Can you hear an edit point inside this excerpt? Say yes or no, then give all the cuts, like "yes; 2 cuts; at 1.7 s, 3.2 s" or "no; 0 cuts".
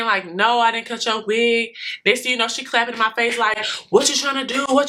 no; 0 cuts